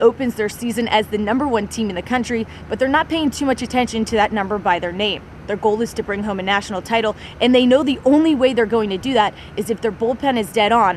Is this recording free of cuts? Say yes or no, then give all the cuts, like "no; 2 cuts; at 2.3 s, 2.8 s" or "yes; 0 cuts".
yes; 0 cuts